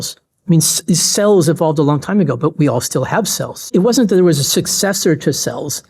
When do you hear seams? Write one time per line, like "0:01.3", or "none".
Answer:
0:03.7